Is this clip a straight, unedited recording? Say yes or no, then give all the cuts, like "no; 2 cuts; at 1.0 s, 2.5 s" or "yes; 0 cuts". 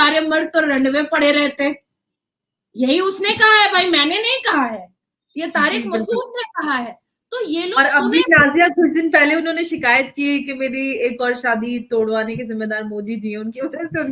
yes; 0 cuts